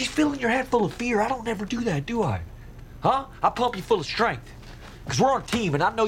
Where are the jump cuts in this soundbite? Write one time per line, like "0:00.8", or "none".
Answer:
none